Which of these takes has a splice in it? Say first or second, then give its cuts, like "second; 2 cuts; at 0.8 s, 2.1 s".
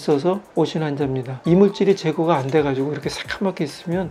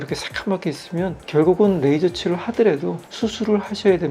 first; 1 cut; at 1.3 s